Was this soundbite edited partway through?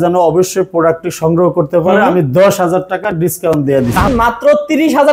yes; 1 cut; at 4.1 s

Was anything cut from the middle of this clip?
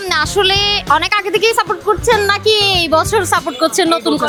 no; 0 cuts

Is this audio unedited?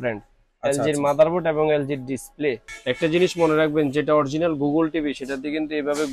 no; 1 cut; at 2.7 s

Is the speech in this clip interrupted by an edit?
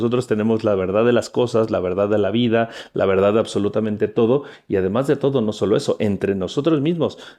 no; 0 cuts

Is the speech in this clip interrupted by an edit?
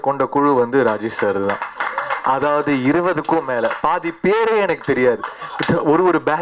no; 0 cuts

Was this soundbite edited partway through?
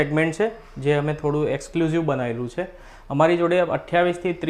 no; 0 cuts

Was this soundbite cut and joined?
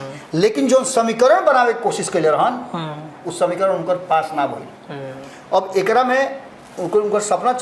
no; 0 cuts

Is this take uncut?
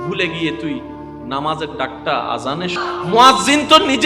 no; 1 cut; at 2.7 s

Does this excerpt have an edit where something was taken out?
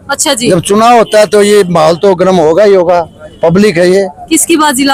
no; 0 cuts

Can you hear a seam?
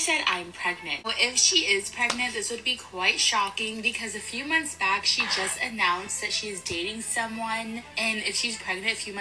yes; 1 cut; at 1.1 s

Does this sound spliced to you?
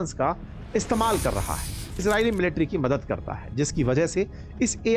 yes; 1 cut; at 2.0 s

